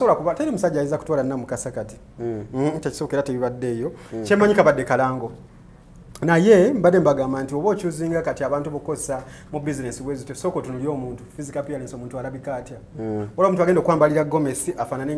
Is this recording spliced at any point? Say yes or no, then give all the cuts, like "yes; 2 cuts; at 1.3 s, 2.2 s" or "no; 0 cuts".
no; 0 cuts